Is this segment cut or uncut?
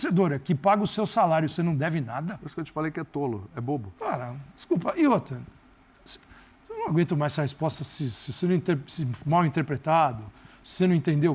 uncut